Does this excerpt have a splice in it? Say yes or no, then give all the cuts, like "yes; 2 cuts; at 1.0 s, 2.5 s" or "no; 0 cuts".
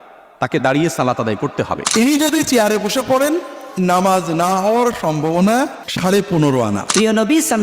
yes; 3 cuts; at 1.8 s, 5.8 s, 6.9 s